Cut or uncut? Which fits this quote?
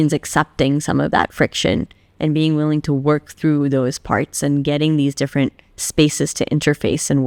uncut